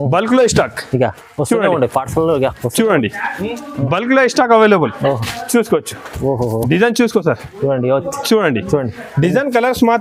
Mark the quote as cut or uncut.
uncut